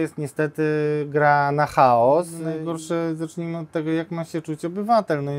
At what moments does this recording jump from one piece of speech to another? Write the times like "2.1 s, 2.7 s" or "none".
2.4 s